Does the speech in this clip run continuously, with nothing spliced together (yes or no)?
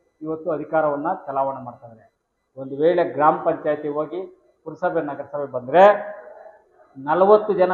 yes